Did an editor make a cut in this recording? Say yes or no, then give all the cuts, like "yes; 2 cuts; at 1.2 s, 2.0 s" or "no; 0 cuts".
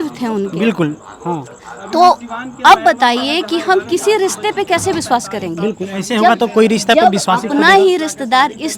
no; 0 cuts